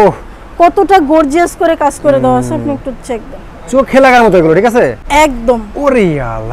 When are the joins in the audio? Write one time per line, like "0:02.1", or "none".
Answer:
0:05.0